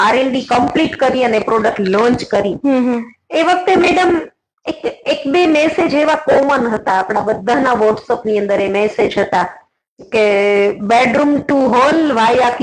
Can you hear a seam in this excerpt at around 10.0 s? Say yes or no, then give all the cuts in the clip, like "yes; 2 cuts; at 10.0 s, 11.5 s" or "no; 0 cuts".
no; 0 cuts